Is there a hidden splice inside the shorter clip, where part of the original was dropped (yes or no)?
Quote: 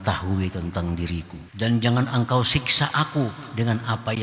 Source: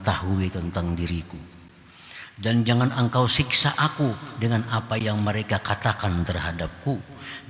yes